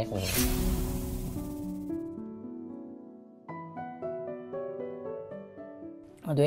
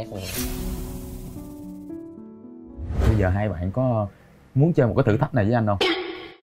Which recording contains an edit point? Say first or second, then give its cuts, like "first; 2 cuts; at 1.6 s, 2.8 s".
second; 1 cut; at 2.9 s